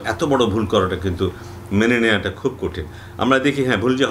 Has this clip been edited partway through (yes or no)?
no